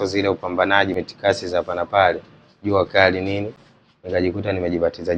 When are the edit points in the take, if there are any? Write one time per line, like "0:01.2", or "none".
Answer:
0:01.0

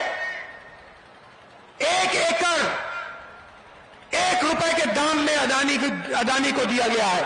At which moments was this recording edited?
none

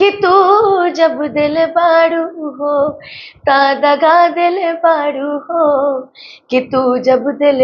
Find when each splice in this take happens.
none

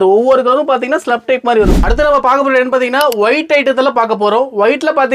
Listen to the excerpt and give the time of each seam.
0:01.7

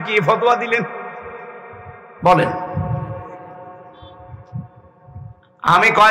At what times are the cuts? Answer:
none

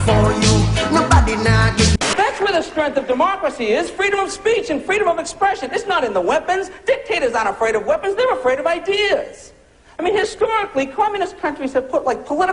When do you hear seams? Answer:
0:05.3

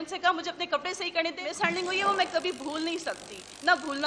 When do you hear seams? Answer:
0:01.4

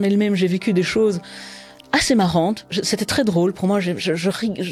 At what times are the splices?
none

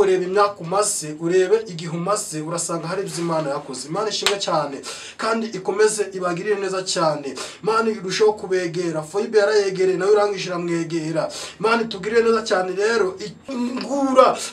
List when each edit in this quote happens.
0:13.4

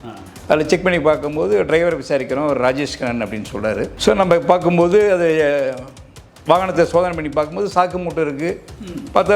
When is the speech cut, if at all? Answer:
0:03.9

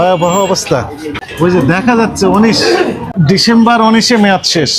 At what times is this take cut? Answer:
0:01.1
0:03.0

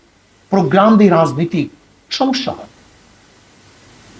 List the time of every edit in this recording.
none

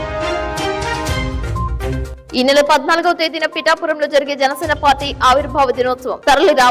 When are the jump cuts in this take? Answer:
none

